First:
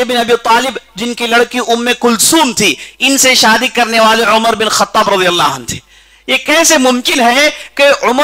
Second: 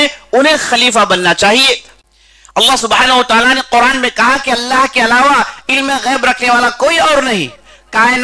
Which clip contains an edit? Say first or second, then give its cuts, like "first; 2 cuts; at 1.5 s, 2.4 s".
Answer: second; 1 cut; at 1.9 s